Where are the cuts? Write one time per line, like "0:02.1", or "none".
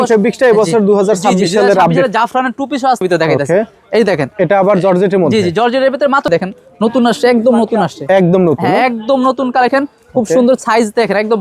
0:03.0
0:06.3
0:09.7